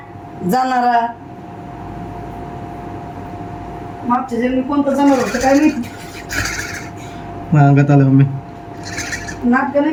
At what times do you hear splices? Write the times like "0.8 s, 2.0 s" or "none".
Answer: none